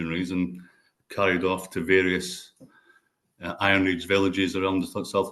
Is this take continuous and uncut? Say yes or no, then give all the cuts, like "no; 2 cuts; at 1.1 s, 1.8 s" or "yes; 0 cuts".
yes; 0 cuts